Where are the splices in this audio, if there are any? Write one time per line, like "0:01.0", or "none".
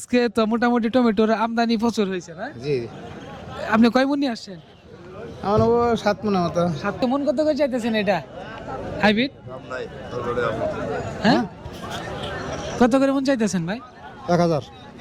0:07.0